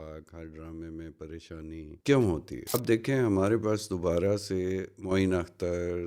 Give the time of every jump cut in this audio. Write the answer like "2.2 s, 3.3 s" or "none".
1.9 s, 2.7 s